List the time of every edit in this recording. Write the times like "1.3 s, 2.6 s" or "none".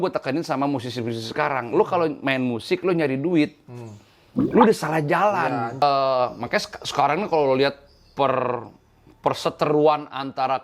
5.8 s